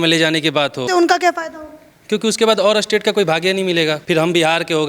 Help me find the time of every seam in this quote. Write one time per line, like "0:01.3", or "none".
0:00.8
0:04.0